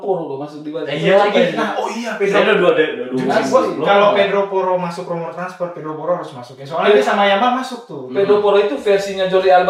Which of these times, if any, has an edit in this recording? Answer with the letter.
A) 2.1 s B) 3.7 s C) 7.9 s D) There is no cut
D